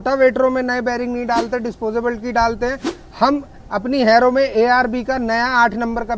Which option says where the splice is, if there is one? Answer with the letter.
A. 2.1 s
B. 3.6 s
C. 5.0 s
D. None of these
D